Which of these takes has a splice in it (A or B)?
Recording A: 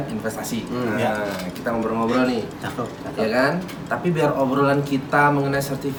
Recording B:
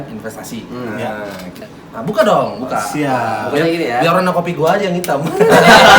B